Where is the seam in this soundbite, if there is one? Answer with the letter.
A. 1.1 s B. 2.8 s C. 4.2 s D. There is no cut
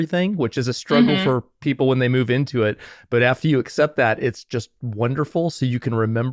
D